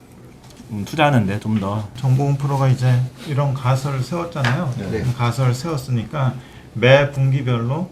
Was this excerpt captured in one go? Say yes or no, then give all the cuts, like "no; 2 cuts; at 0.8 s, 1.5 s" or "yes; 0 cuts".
no; 1 cut; at 1.9 s